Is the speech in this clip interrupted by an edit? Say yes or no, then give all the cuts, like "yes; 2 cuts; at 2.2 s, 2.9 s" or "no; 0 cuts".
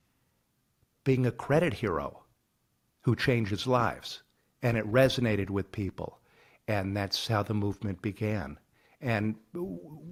no; 0 cuts